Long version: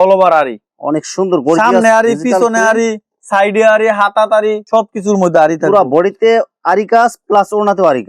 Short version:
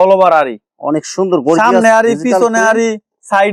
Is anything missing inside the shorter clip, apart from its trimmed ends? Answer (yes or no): no